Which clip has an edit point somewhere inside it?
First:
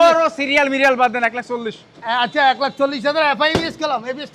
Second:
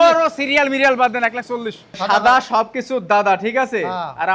second; 1 cut; at 1.9 s

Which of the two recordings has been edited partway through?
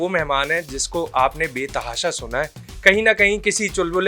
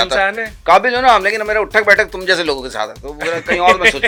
first; 1 cut; at 2.7 s

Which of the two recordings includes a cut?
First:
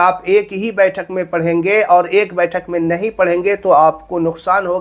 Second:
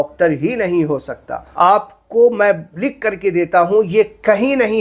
second; 1 cut; at 1.4 s

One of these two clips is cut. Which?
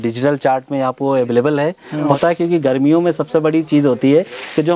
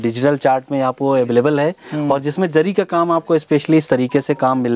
first; 1 cut; at 2.1 s

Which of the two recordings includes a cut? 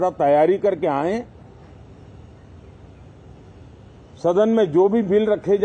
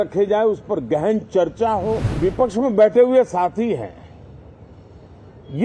second; 1 cut; at 2.1 s

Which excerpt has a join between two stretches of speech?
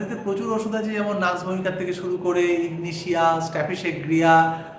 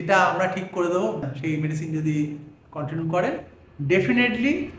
second; 1 cut; at 1.4 s

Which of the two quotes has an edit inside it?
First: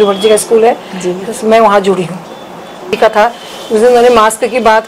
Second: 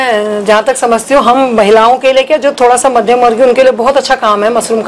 first; 1 cut; at 2.9 s

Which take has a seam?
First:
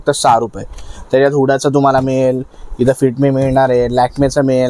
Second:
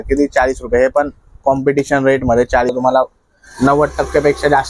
second; 1 cut; at 2.7 s

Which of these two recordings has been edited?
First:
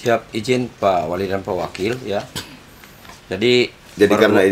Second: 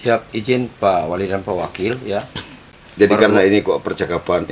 second; 1 cut; at 2.8 s

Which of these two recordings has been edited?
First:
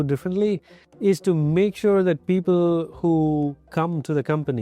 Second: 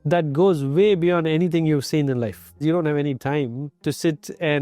second; 2 cuts; at 2.6 s, 3.7 s

